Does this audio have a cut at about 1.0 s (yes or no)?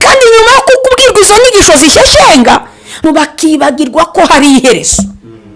no